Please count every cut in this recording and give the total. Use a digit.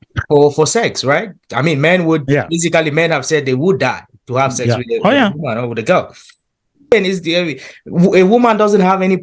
1